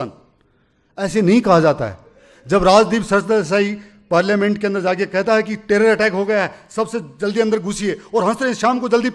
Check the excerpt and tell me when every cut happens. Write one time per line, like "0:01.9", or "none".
none